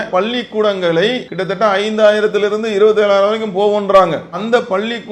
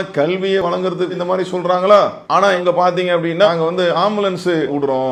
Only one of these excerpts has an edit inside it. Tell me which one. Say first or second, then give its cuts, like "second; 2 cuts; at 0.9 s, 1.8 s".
first; 1 cut; at 1.3 s